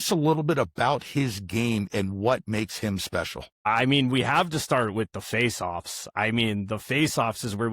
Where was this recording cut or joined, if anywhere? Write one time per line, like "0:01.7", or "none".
0:03.7